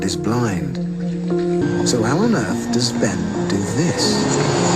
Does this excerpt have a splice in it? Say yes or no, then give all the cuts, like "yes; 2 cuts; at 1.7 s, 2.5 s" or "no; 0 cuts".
yes; 1 cut; at 1.6 s